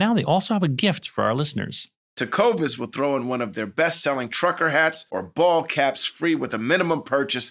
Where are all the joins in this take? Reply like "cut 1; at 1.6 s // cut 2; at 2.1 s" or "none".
none